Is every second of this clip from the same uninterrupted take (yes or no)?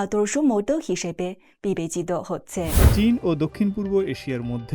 no